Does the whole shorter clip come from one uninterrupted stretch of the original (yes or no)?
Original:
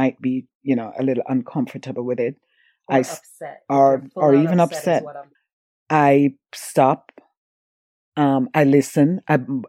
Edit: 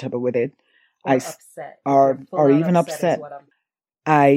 yes